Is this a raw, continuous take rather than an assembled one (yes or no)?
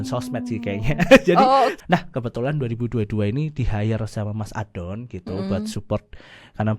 no